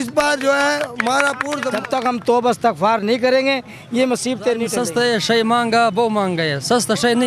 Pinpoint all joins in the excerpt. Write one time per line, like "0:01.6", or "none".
0:01.8
0:04.8